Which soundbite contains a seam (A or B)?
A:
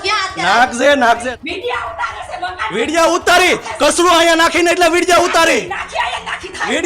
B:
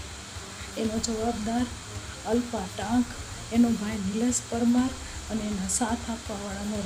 A